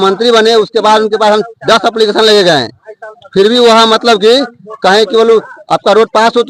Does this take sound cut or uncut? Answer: uncut